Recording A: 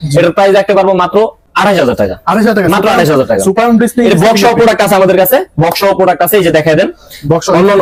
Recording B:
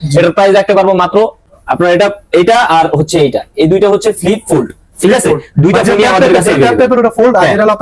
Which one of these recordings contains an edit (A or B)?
B